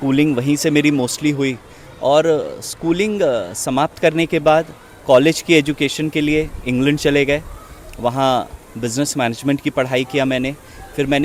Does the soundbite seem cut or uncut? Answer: uncut